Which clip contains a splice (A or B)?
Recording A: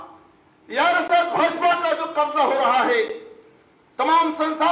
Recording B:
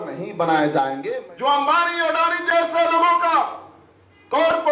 B